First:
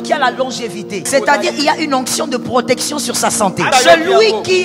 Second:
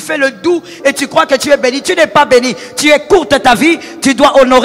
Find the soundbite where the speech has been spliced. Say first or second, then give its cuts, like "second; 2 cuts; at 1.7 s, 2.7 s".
first; 2 cuts; at 1.1 s, 3.7 s